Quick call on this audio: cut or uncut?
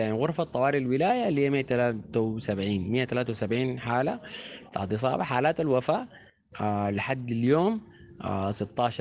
uncut